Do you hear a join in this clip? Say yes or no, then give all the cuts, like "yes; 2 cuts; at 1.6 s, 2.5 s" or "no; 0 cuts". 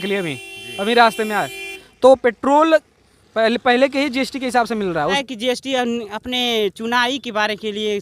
yes; 1 cut; at 5.2 s